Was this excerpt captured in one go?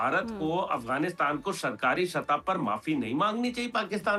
yes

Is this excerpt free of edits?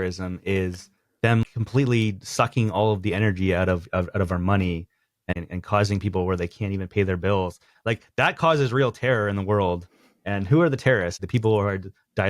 no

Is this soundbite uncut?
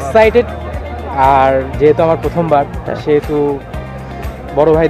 yes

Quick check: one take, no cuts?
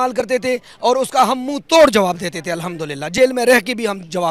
yes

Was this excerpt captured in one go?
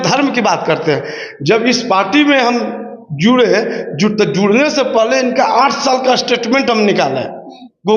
yes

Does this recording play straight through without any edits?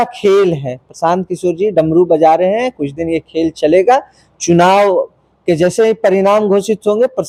yes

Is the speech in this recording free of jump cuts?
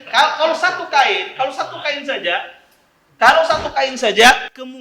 yes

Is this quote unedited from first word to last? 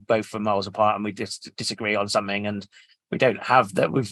yes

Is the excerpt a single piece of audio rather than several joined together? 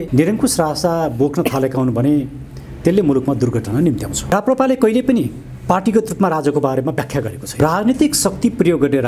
no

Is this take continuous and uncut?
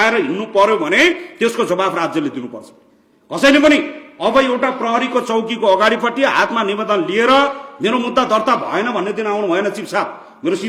yes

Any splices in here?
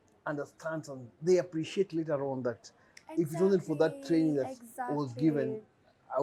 no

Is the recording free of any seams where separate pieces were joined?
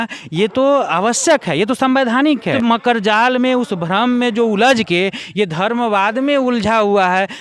no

